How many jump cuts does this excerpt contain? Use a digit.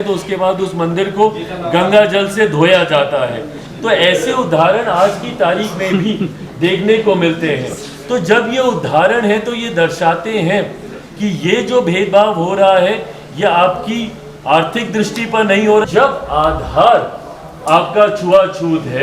1